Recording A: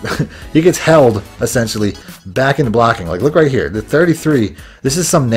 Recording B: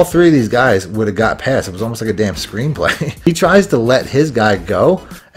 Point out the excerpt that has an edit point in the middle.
B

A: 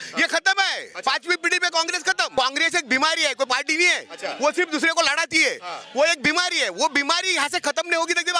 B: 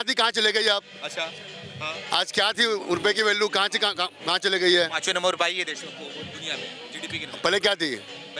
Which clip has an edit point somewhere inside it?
A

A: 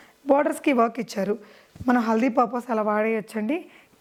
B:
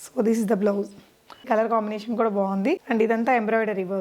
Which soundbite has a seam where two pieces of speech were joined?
B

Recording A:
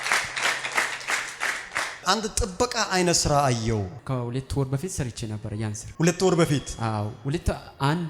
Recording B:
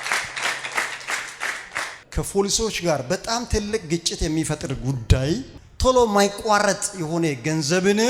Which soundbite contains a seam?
A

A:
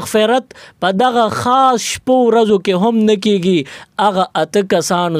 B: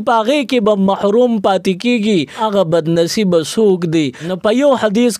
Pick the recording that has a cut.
B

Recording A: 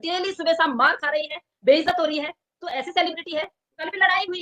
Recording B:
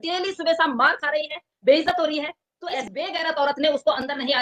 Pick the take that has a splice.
B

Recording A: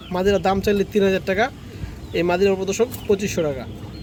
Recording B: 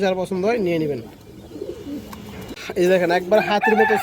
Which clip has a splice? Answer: B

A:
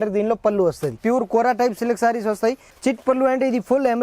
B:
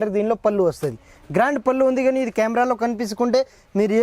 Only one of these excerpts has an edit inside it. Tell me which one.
A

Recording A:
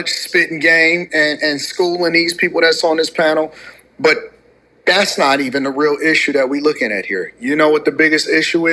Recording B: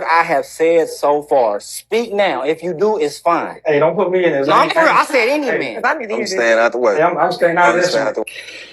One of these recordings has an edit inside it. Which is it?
B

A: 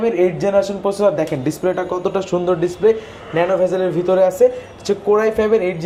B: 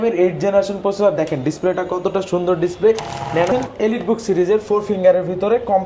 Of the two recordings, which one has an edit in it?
B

